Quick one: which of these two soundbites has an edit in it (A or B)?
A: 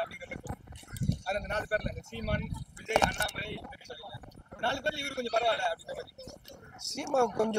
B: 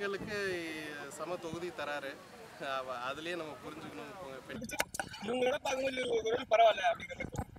B